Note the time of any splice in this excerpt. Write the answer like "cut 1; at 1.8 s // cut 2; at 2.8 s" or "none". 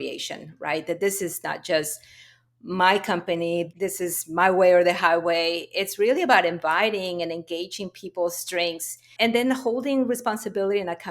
cut 1; at 3.7 s // cut 2; at 9.1 s